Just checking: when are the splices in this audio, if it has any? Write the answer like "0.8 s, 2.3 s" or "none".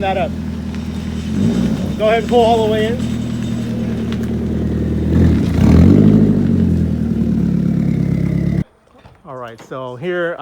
8.7 s